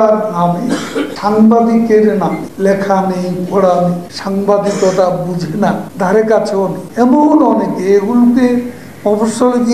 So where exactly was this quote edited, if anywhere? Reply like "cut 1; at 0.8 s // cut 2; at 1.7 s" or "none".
cut 1; at 1.1 s // cut 2; at 2.5 s // cut 3; at 4.1 s // cut 4; at 5.9 s // cut 5; at 6.8 s